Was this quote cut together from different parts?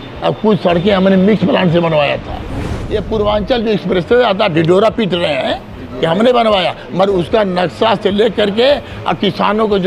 yes; 1 cut; at 2.8 s

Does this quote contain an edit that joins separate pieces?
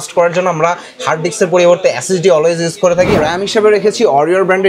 yes; 1 cut; at 3.2 s

